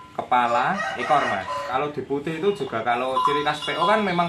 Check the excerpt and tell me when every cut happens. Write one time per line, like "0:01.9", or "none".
0:01.7